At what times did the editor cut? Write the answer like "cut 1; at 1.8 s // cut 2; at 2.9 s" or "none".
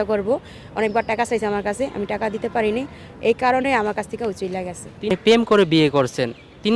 cut 1; at 5.1 s